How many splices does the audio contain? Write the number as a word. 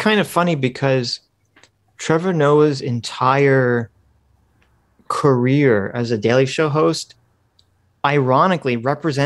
zero